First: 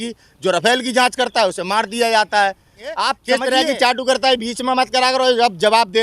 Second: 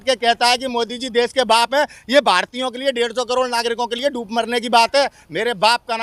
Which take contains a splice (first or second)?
first